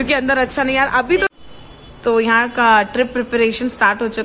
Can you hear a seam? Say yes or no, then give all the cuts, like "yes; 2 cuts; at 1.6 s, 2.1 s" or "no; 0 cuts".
yes; 1 cut; at 1.3 s